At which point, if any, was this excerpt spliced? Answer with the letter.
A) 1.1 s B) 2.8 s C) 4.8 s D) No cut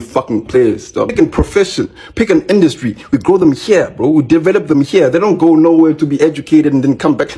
A